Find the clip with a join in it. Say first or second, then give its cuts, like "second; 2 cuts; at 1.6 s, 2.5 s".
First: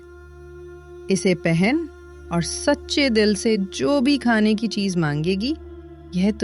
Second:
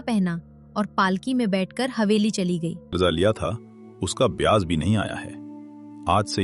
second; 1 cut; at 2.9 s